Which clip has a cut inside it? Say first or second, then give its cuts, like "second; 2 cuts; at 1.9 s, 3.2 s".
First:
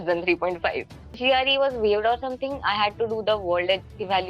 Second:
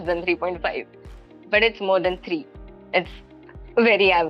first; 1 cut; at 1.2 s